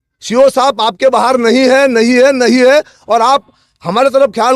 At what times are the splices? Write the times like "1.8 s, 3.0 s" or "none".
none